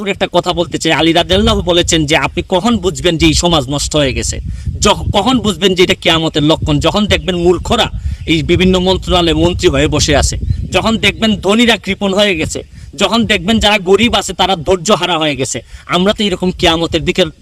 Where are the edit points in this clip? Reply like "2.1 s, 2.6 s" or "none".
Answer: none

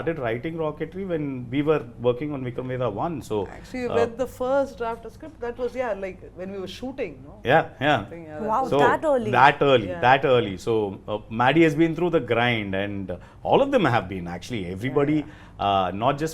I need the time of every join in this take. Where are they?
none

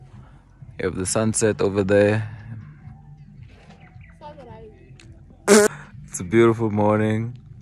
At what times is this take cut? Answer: none

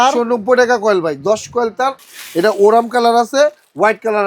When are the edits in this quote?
2.0 s

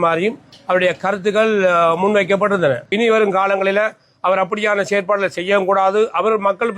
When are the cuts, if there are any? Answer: 2.9 s

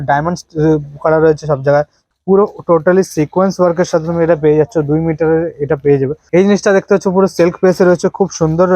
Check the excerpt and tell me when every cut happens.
2.0 s, 6.2 s

